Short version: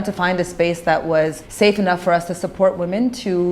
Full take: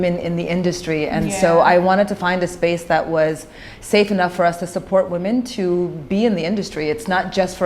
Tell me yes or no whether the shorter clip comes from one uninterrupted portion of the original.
no